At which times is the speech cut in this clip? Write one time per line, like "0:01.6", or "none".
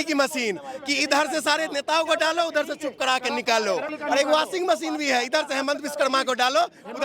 0:03.9